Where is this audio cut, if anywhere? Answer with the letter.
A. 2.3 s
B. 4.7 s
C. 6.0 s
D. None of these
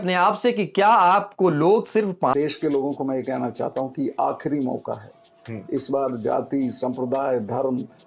A